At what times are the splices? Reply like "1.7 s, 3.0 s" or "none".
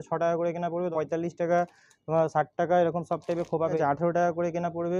0.9 s, 3.8 s